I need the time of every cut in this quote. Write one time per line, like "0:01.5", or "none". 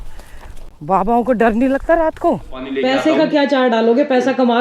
0:02.7